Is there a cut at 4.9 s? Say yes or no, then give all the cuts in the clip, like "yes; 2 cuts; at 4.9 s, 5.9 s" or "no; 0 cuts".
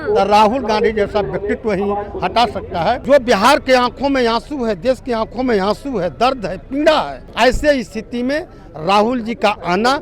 no; 2 cuts; at 3.0 s, 7.2 s